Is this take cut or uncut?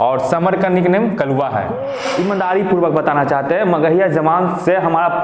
cut